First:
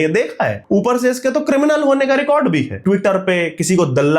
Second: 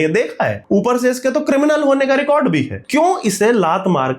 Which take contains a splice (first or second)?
first